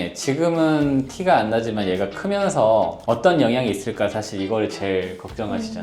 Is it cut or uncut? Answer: uncut